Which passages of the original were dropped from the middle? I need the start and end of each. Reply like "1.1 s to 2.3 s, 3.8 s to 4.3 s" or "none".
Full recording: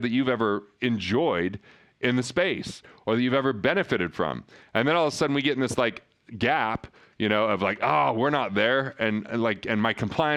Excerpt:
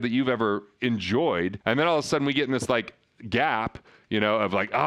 1.6 s to 4.7 s